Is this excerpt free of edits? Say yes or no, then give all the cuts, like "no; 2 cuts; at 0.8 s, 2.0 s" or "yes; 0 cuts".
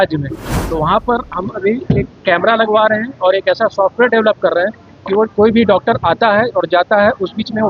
yes; 0 cuts